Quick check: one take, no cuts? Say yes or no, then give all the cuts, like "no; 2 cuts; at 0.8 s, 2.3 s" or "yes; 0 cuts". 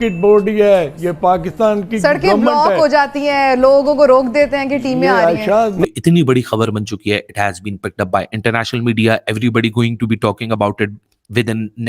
no; 1 cut; at 5.8 s